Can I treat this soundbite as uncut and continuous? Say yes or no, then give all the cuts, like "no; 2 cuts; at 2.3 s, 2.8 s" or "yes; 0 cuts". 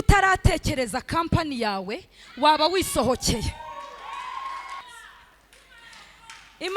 no; 1 cut; at 4.8 s